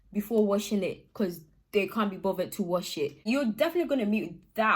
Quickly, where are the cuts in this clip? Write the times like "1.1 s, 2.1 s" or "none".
3.2 s

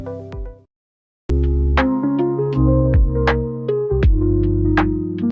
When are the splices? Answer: 1.1 s

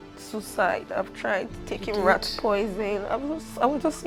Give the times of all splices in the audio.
none

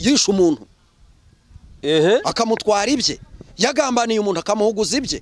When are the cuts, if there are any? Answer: none

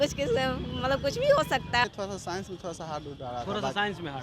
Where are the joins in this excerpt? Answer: 1.8 s

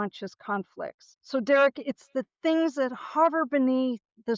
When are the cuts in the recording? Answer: 1.1 s

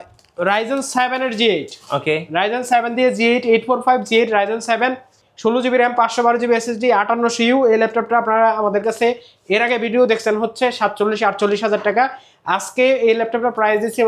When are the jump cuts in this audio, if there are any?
none

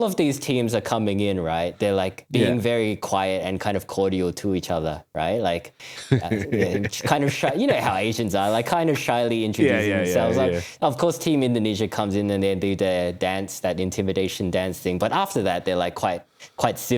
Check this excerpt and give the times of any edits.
none

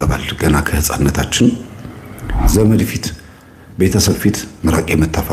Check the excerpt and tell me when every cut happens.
2.4 s

